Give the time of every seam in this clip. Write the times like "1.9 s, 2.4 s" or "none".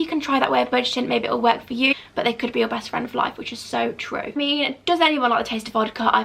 1.9 s, 4.4 s